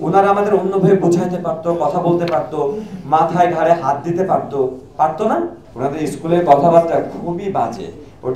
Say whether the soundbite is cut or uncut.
cut